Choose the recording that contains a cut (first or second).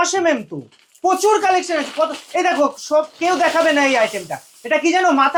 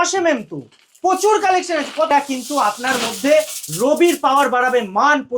second